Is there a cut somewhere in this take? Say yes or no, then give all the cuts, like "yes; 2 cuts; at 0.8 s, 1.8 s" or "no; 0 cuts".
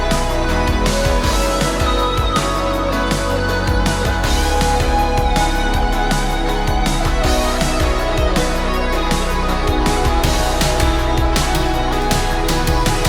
no; 0 cuts